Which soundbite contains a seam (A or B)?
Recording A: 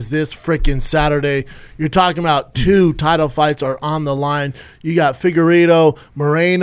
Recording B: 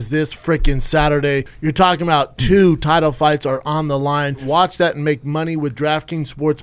B